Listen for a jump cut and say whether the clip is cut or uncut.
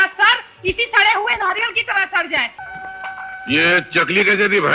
cut